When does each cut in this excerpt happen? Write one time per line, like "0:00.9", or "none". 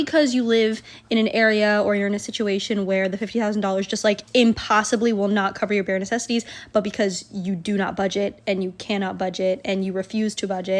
none